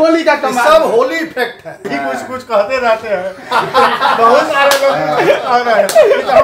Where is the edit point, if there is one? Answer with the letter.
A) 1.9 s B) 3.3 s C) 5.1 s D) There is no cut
A